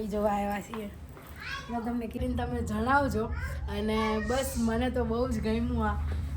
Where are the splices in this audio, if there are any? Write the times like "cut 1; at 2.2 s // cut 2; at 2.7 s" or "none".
cut 1; at 2.2 s